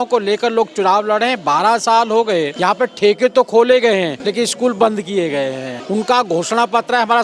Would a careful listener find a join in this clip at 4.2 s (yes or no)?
yes